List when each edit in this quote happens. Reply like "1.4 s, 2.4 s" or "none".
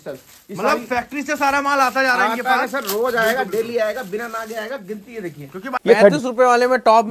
5.8 s